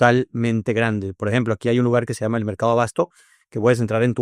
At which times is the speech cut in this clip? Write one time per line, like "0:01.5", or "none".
none

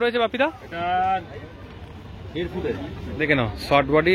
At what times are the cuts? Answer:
0:03.1

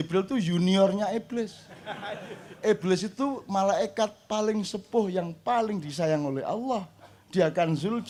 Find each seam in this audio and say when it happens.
none

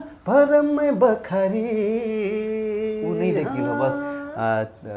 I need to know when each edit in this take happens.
0:03.8

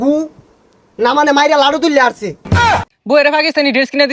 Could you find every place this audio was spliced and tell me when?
0:02.6

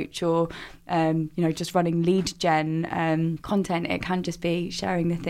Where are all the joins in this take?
0:03.4

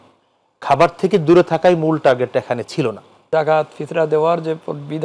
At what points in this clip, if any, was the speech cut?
0:03.3

